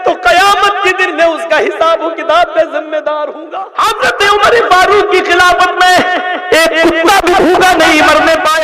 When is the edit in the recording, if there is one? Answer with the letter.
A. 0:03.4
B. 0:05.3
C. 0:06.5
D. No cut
A